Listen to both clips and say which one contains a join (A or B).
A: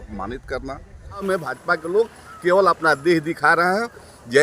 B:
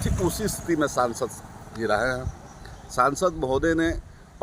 A